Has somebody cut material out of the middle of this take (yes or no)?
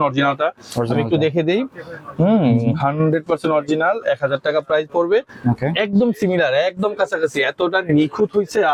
no